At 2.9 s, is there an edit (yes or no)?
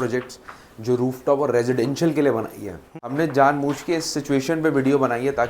yes